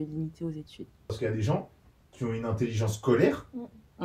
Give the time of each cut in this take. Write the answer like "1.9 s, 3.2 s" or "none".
1.2 s